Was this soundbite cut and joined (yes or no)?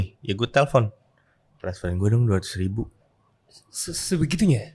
no